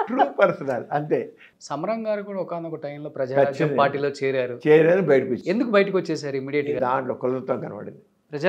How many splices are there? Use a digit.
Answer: 2